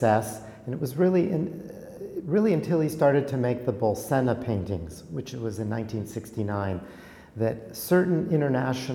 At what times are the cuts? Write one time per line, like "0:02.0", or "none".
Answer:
none